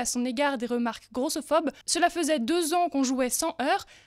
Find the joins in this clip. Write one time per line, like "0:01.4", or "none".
0:01.8